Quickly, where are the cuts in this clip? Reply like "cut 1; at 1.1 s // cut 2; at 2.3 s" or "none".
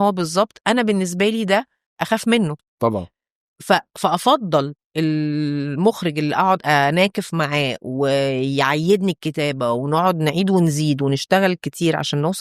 cut 1; at 2.6 s